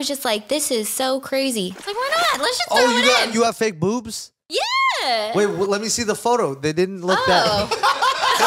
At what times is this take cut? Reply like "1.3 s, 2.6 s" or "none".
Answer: 1.7 s